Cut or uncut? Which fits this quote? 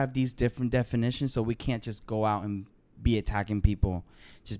uncut